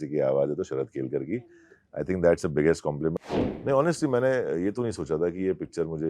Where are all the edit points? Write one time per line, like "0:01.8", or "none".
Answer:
0:03.1

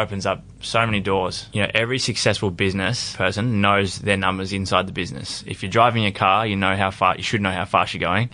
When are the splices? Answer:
0:01.4
0:03.0

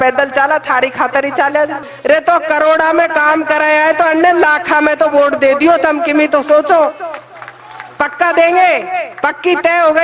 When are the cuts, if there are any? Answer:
0:01.9
0:09.1

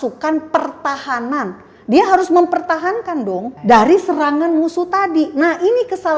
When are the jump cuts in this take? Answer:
0:03.5

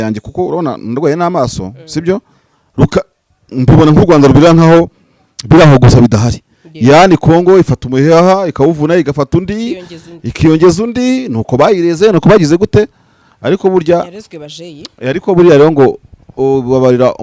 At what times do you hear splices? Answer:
none

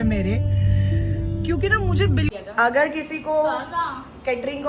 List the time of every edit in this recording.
0:02.3

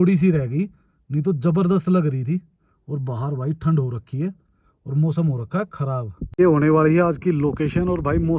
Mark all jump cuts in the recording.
0:06.2

